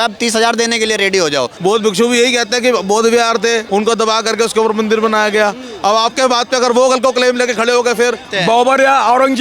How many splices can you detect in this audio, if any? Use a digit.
3